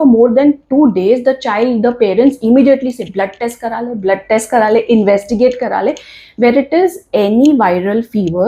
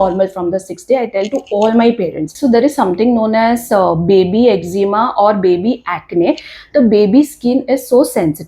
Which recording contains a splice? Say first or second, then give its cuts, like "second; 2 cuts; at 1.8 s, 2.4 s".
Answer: second; 1 cut; at 2.3 s